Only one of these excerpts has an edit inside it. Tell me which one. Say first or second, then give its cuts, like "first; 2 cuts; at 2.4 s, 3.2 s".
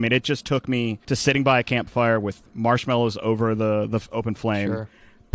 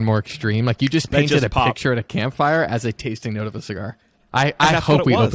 first; 1 cut; at 1.0 s